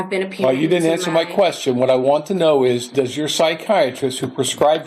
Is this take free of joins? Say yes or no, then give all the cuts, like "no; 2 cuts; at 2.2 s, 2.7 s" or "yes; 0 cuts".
yes; 0 cuts